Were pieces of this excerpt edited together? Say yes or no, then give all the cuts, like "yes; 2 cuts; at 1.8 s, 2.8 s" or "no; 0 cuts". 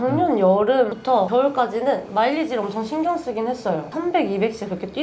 yes; 2 cuts; at 1.1 s, 3.9 s